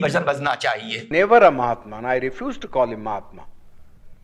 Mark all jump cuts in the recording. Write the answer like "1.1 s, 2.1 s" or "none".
0.9 s